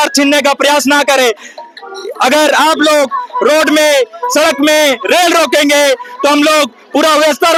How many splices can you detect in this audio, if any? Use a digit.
0